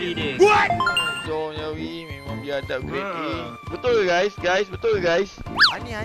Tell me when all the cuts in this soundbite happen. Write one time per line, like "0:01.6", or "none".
0:01.3